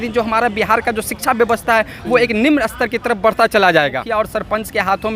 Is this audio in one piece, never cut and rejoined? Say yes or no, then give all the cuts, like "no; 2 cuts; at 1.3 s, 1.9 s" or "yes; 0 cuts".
no; 1 cut; at 4.0 s